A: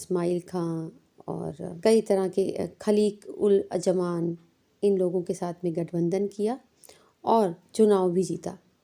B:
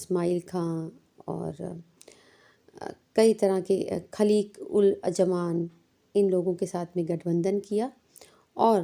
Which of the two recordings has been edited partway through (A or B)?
A